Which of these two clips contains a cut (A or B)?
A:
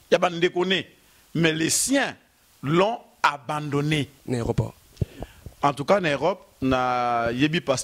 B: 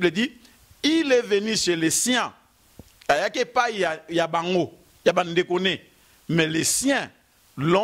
A